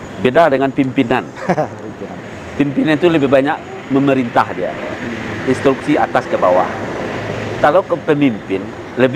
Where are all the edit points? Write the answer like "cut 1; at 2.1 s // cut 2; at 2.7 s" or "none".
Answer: none